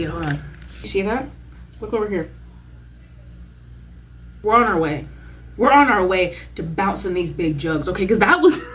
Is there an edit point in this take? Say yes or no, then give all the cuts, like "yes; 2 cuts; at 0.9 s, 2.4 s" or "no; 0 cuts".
yes; 2 cuts; at 0.9 s, 4.4 s